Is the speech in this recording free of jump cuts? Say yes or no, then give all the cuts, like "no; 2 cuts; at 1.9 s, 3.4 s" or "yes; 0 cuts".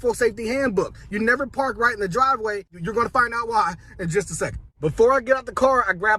yes; 0 cuts